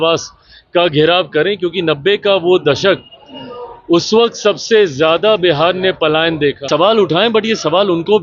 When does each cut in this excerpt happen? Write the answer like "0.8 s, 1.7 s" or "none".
6.7 s